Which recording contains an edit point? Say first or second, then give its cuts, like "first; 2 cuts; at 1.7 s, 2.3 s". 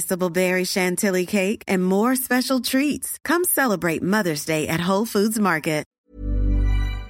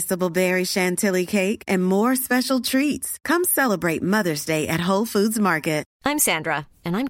first; 1 cut; at 5.9 s